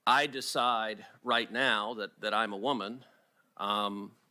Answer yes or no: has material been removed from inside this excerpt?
no